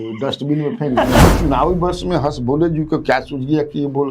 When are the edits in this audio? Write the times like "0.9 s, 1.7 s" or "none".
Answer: 1.2 s